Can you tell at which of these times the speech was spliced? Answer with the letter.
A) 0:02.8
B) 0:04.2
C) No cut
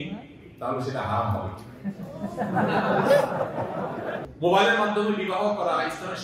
B